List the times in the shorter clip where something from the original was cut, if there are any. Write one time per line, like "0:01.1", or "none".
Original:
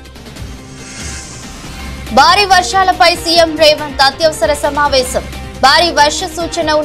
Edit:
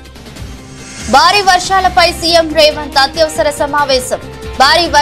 0:01.0